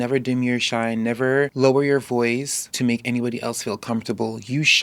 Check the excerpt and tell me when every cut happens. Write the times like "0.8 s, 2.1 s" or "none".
1.5 s, 2.6 s